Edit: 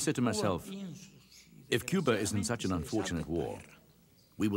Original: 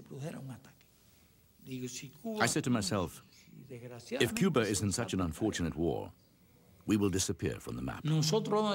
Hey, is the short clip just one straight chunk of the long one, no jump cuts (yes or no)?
yes